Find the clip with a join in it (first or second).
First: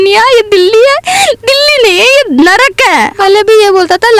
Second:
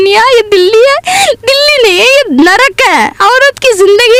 first